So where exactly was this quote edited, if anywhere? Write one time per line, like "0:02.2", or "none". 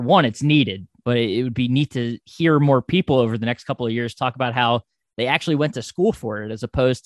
0:00.9